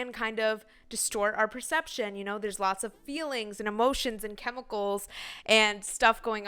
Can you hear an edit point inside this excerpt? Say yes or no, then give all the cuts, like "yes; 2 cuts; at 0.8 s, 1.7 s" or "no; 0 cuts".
no; 0 cuts